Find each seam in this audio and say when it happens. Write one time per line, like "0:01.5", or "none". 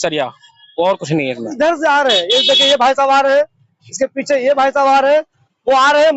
0:01.5

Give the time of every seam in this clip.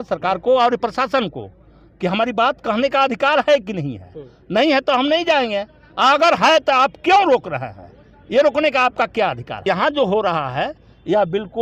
0:09.7

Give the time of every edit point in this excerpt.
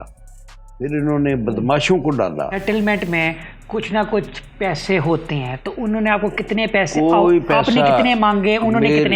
0:02.6

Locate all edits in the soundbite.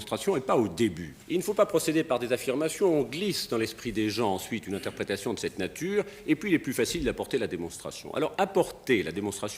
0:01.1

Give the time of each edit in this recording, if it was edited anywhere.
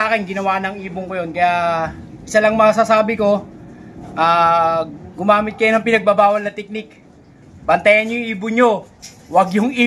none

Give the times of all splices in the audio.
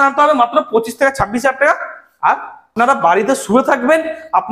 0:02.7

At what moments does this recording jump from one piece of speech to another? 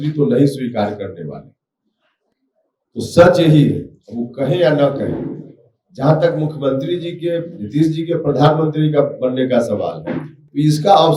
none

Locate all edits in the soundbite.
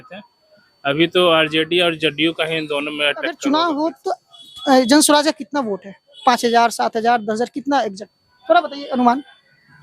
0:03.3

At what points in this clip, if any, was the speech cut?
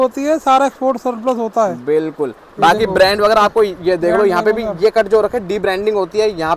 none

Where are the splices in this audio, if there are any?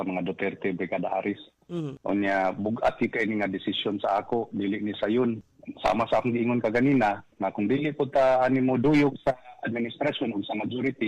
0:05.6

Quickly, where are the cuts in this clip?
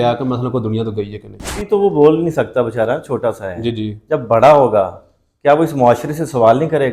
0:01.6

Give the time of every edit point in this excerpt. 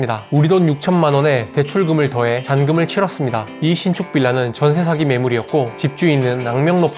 0:03.5

